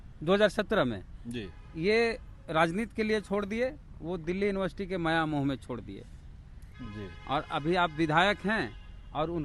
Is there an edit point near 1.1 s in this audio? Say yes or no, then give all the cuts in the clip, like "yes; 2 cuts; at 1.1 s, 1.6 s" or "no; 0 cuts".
no; 0 cuts